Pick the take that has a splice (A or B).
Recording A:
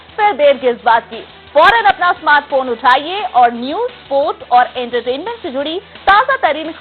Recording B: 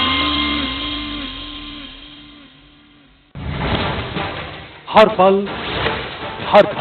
B